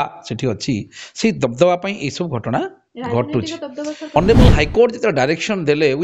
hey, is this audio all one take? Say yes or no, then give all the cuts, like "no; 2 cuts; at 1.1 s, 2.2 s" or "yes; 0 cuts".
no; 1 cut; at 4.2 s